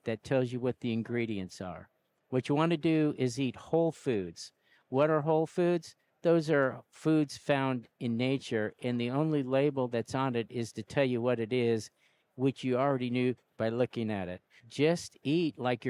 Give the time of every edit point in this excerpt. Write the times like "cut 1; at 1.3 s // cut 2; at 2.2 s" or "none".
cut 1; at 14.6 s